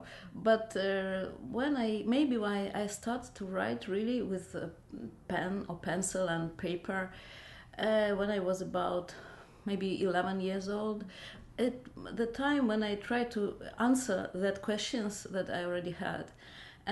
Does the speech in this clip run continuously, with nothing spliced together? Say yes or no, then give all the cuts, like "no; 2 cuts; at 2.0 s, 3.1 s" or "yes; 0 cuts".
no; 1 cut; at 13.1 s